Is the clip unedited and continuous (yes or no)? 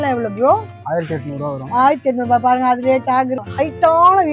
no